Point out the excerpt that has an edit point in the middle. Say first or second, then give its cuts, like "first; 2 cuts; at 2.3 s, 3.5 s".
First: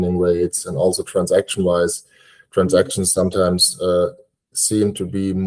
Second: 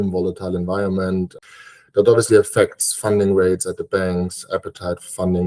second; 1 cut; at 1.4 s